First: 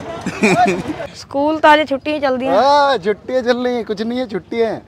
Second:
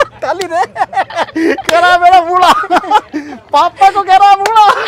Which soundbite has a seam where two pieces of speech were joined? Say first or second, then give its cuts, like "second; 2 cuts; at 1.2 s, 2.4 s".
first; 1 cut; at 1.1 s